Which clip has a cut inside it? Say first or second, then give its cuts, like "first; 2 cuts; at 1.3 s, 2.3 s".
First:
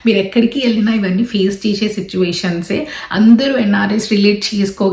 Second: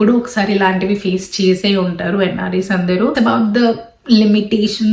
second; 1 cut; at 3.1 s